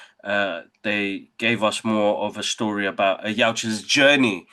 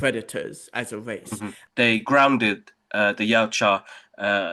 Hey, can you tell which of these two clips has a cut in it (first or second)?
second